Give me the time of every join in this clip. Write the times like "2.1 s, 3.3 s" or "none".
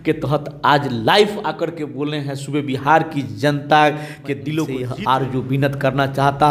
4.8 s